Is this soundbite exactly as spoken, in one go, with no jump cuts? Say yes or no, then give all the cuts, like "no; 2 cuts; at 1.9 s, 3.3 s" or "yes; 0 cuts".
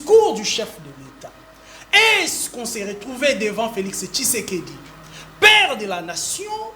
yes; 0 cuts